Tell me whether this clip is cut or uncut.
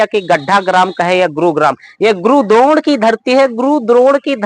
uncut